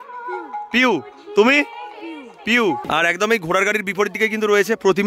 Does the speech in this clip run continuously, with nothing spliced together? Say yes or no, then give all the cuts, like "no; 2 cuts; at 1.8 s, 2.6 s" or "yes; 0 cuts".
no; 1 cut; at 2.8 s